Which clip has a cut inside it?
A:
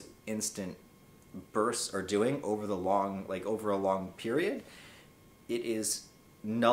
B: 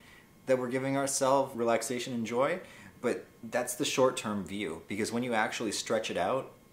B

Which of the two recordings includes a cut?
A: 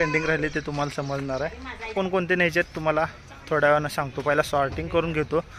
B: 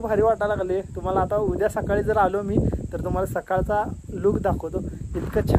A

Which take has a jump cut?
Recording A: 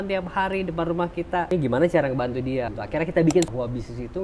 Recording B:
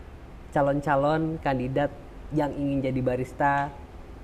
A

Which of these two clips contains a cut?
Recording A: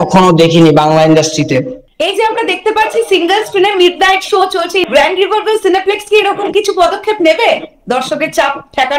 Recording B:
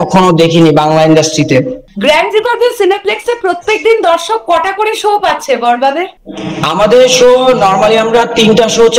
A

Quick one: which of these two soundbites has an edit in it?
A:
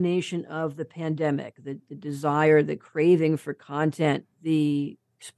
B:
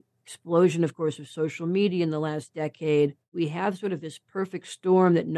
B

